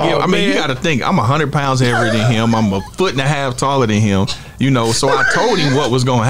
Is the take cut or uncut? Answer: uncut